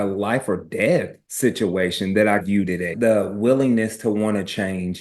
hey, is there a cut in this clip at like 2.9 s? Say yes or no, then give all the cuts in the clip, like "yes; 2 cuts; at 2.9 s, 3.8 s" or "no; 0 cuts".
yes; 1 cut; at 2.9 s